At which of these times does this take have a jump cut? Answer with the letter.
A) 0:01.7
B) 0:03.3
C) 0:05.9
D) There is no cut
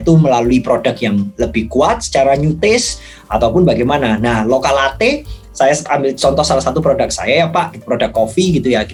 D